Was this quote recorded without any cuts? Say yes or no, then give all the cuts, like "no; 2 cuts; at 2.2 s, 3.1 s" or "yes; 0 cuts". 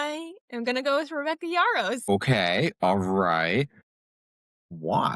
no; 1 cut; at 2.1 s